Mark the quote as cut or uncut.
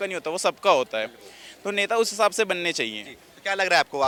uncut